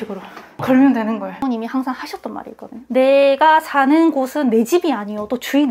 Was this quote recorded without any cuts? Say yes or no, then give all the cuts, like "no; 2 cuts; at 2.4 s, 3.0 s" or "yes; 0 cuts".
no; 1 cut; at 1.4 s